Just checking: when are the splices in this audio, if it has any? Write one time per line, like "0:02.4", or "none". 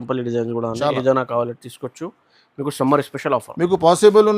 none